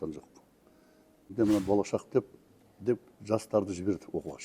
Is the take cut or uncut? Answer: cut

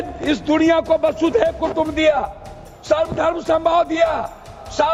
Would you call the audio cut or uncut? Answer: uncut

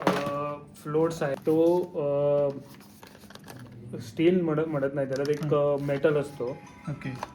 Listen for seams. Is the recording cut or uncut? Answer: cut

